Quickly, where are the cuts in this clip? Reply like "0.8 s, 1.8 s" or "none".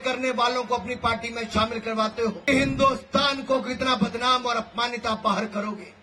2.5 s